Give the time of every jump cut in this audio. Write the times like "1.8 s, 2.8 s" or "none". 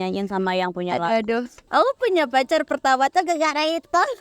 1.6 s